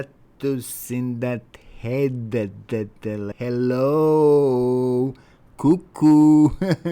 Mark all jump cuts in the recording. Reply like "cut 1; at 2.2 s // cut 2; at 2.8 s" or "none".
cut 1; at 3.3 s